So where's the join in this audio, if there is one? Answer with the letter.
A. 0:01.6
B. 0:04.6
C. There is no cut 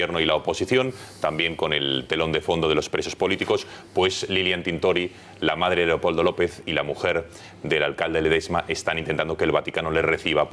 A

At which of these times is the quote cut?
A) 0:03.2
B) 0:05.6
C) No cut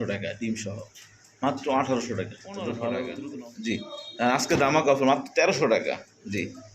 A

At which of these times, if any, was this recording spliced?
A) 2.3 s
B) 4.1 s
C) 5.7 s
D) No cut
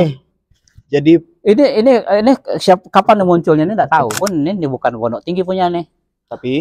B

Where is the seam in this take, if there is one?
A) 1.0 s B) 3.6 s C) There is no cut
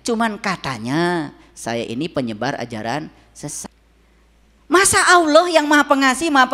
B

